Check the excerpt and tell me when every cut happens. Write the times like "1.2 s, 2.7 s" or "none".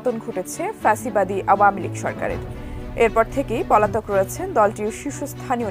none